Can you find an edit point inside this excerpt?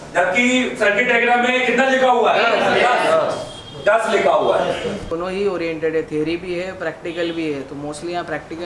yes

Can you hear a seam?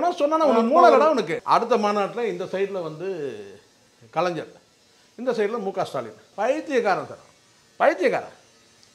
yes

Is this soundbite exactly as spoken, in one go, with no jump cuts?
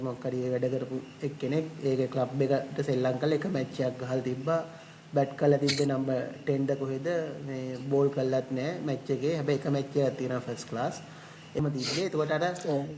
no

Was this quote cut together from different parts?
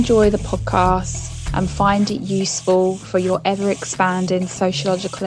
no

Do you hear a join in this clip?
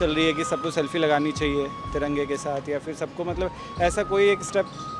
no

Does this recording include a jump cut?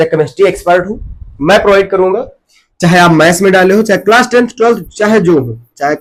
no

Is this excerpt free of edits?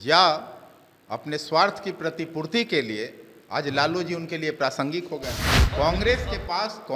no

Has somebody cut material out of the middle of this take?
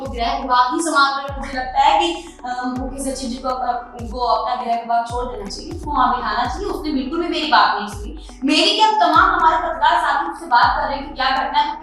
no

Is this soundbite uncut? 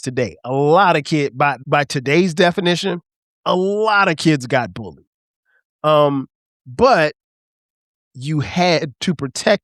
no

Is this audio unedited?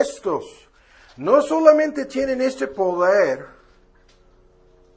no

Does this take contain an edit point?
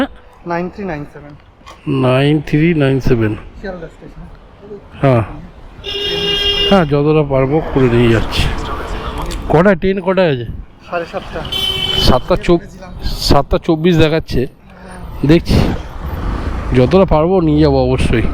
no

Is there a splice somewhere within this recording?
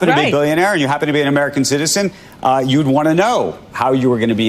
no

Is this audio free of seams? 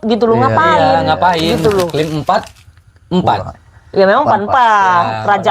no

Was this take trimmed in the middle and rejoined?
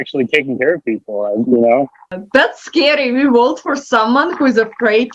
yes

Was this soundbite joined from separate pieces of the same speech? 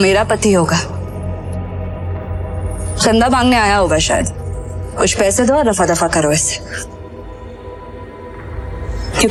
no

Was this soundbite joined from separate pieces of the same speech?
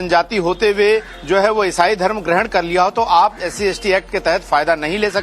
no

